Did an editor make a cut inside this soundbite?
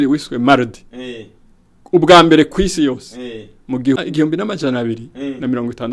yes; 1 cut; at 4.0 s

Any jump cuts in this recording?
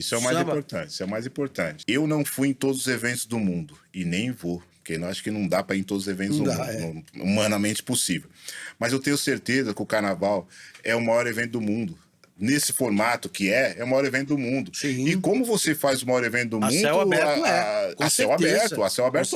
yes; 1 cut; at 1.8 s

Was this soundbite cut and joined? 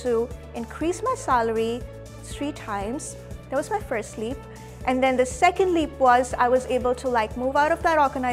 no; 0 cuts

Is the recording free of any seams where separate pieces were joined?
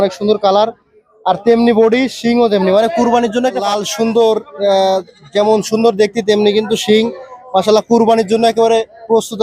no; 1 cut; at 3.7 s

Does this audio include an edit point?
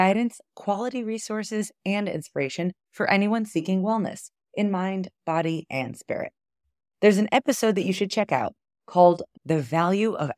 no; 0 cuts

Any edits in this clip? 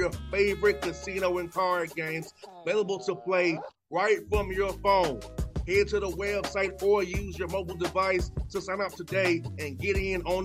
no; 0 cuts

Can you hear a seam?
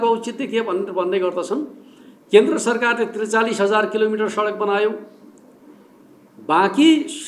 no; 0 cuts

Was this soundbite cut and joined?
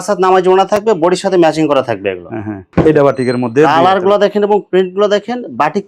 yes; 1 cut; at 2.7 s

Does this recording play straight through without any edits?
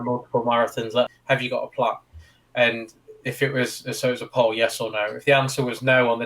no; 1 cut; at 1.1 s

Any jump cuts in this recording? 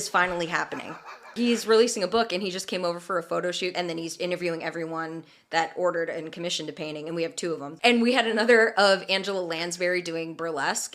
yes; 3 cuts; at 1.3 s, 3.7 s, 7.7 s

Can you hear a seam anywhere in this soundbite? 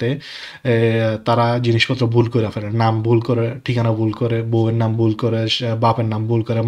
no; 0 cuts

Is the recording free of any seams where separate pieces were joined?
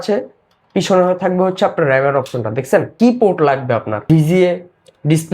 no; 1 cut; at 2.9 s

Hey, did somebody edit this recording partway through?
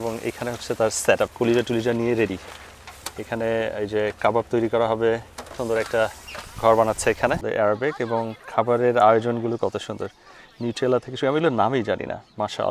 yes; 3 cuts; at 1.3 s, 5.5 s, 7.4 s

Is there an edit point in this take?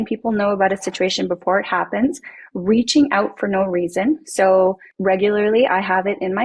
yes; 1 cut; at 4.9 s

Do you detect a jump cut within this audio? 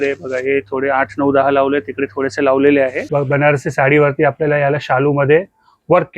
yes; 1 cut; at 3.0 s

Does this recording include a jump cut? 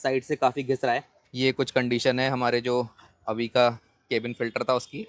yes; 1 cut; at 1.2 s

